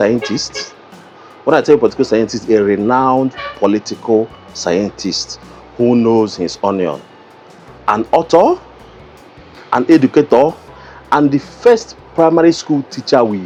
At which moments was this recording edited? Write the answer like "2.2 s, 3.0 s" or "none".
none